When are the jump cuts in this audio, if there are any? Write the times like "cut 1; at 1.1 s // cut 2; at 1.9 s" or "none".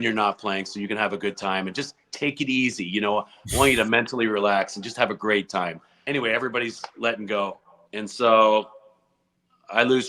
cut 1; at 6.0 s